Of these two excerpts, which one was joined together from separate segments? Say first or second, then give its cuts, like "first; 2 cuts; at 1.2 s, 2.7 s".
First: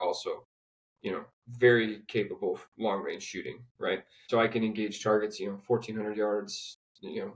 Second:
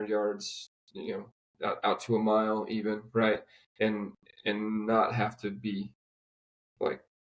first; 1 cut; at 4.2 s